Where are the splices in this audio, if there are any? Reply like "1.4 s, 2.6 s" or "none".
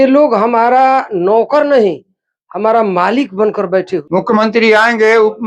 4.0 s